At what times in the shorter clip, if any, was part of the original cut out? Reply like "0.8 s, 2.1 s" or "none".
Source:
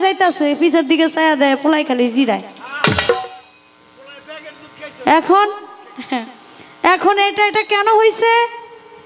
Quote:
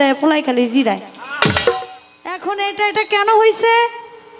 2.4 s